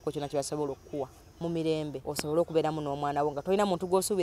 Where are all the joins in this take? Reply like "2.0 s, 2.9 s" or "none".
2.0 s